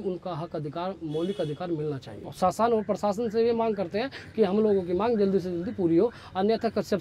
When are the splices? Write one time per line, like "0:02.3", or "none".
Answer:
0:02.1